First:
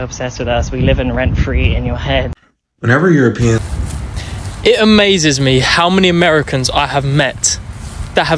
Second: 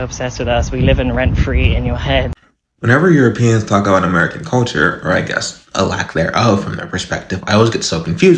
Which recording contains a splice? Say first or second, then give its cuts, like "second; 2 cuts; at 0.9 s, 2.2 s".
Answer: first; 1 cut; at 3.6 s